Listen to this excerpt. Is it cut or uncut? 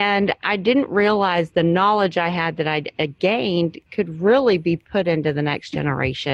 uncut